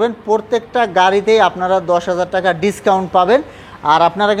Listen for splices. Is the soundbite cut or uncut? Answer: uncut